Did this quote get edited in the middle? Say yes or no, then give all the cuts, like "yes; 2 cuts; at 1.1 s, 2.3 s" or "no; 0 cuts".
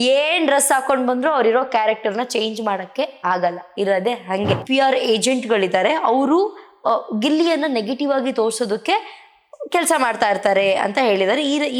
yes; 1 cut; at 4.6 s